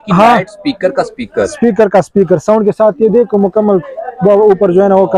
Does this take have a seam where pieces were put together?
no; 0 cuts

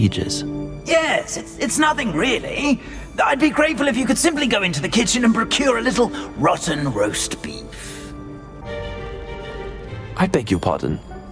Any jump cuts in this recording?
yes; 1 cut; at 8.6 s

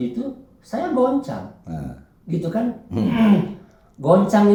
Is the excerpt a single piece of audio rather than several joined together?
yes; 0 cuts

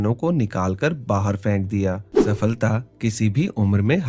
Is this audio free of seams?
no; 1 cut; at 2.1 s

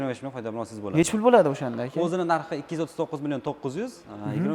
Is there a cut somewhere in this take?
no; 0 cuts

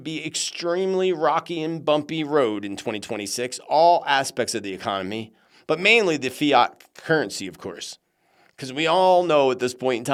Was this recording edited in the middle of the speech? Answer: no; 0 cuts

